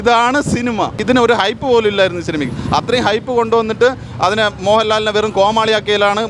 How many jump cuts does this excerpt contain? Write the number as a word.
one